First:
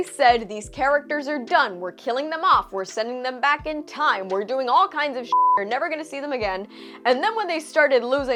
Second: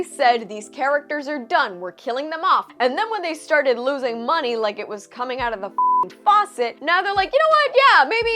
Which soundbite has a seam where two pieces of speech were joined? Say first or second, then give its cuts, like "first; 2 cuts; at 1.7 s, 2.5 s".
second; 2 cuts; at 2.7 s, 6.8 s